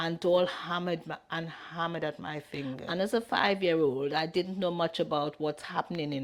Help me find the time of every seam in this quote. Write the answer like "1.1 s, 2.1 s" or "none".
2.8 s